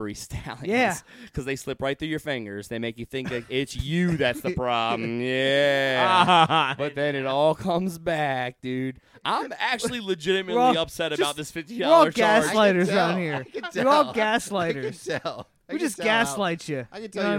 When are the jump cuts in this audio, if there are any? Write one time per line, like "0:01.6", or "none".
none